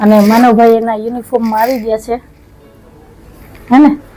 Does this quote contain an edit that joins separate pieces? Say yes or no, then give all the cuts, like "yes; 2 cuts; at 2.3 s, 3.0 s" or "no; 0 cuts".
no; 0 cuts